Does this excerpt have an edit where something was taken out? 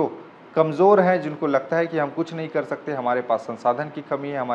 no; 0 cuts

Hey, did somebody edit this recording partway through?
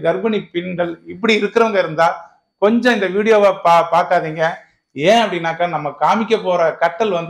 no; 0 cuts

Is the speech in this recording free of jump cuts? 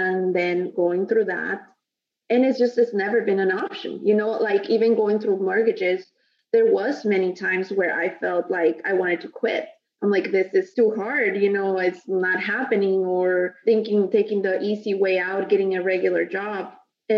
no; 3 cuts; at 2.6 s, 10.7 s, 13.6 s

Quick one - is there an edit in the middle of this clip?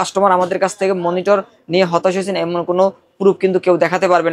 no; 0 cuts

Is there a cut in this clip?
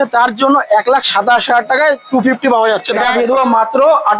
yes; 1 cut; at 3.1 s

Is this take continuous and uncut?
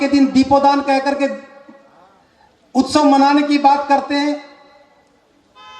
yes; 0 cuts

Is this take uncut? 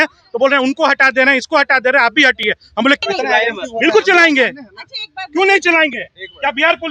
no; 1 cut; at 3.0 s

